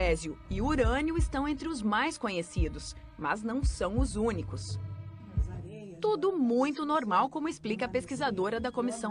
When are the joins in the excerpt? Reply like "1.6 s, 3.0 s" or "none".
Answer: 2.3 s